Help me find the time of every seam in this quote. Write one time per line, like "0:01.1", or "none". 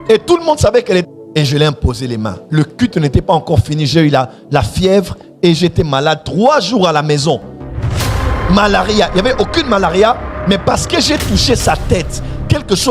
0:01.0